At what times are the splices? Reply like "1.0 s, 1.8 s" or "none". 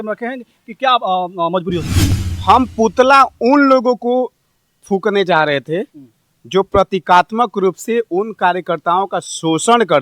2.0 s